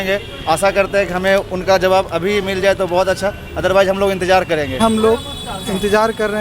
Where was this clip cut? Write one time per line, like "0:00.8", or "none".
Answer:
0:04.8

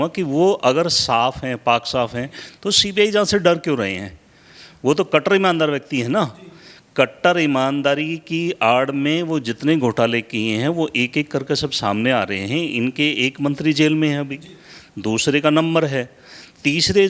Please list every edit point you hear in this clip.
none

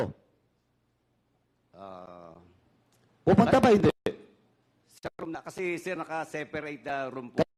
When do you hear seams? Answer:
none

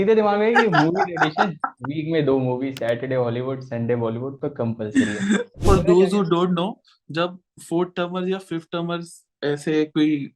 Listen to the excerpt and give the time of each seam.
0:05.6

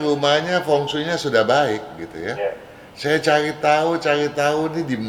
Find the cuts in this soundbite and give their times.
none

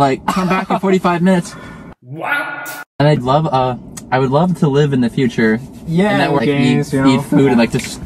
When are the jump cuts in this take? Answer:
0:03.2

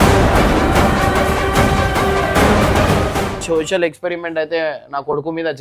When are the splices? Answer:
0:03.4

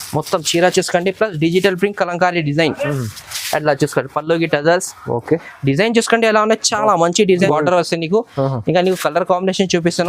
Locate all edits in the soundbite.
0:07.4

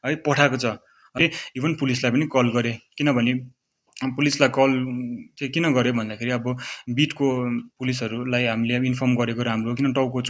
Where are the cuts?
0:01.2

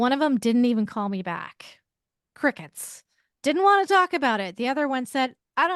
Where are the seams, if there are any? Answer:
none

